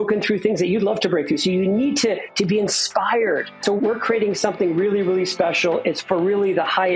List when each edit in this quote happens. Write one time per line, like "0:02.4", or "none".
0:03.7